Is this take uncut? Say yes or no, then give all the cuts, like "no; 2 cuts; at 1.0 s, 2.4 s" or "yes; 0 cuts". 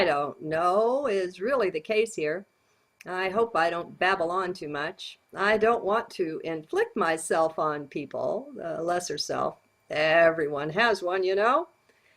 no; 1 cut; at 4.6 s